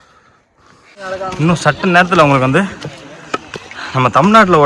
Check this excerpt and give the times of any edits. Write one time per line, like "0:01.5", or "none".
0:01.0